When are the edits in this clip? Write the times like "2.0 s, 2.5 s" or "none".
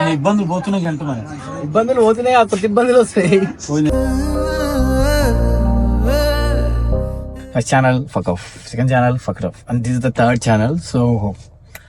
7.2 s